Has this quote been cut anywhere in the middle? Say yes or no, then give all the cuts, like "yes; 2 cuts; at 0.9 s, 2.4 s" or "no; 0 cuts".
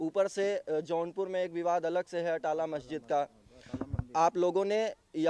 no; 0 cuts